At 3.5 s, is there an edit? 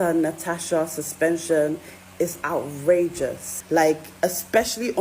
yes; 1 cut; at 3.5 s

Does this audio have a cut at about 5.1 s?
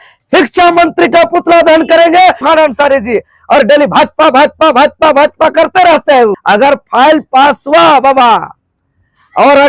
no; 2 cuts; at 2.4 s, 6.4 s

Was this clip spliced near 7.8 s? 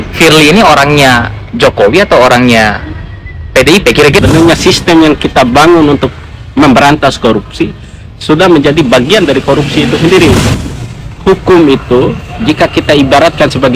no; 2 cuts; at 4.2 s, 10.5 s

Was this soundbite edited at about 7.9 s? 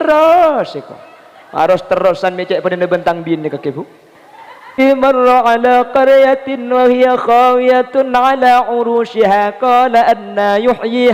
no; 1 cut; at 4.7 s

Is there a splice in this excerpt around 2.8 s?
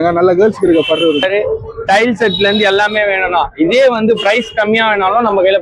no; 1 cut; at 1.2 s

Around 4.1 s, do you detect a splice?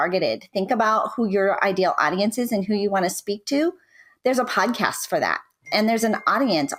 no; 0 cuts

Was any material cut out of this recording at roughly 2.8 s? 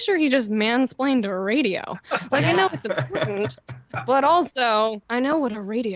no; 0 cuts

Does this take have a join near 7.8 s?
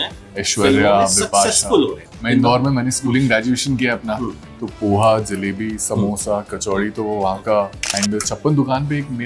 yes; 2 cuts; at 2.0 s, 7.8 s

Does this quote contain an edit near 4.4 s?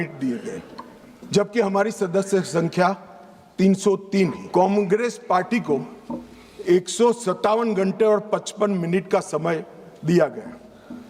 yes; 1 cut; at 4.4 s

